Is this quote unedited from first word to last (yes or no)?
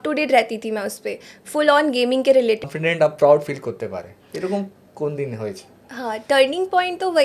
no